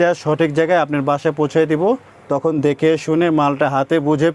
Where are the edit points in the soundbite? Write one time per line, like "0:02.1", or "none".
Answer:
none